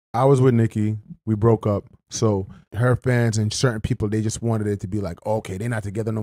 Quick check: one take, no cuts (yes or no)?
no